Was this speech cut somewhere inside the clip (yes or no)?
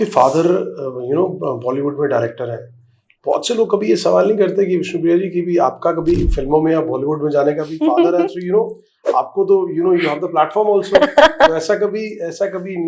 no